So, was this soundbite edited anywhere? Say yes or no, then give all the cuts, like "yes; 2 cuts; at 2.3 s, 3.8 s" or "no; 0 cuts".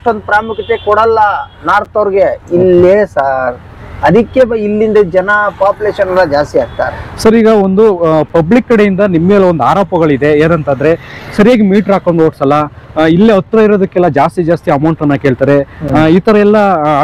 no; 0 cuts